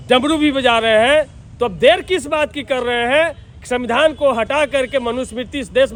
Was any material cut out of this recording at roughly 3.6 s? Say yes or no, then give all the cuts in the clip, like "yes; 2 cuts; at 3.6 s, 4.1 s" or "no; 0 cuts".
no; 0 cuts